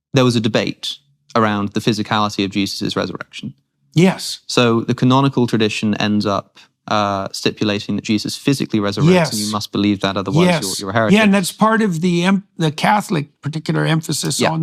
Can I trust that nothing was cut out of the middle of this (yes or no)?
yes